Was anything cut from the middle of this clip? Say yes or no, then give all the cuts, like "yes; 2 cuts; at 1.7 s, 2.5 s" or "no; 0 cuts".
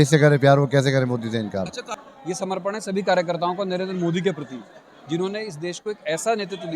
yes; 1 cut; at 1.6 s